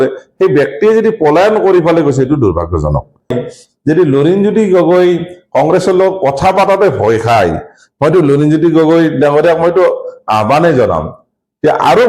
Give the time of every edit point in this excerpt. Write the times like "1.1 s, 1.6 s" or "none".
3.4 s